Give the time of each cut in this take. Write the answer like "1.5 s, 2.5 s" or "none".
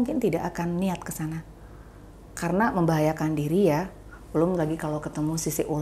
none